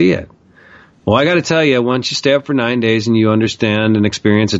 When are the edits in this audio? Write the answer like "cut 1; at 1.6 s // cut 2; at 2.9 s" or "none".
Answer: none